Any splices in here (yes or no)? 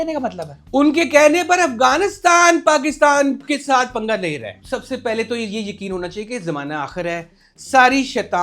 yes